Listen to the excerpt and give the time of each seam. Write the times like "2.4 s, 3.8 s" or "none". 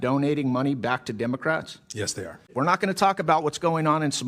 2.5 s